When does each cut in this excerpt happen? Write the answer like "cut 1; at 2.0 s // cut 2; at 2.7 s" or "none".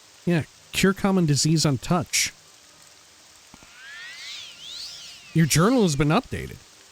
cut 1; at 5.3 s